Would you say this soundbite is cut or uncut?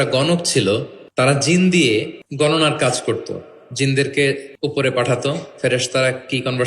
cut